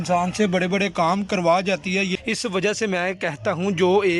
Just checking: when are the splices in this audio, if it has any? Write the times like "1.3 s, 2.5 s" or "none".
2.1 s